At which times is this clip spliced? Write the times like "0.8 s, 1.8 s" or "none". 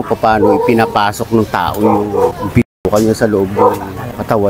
none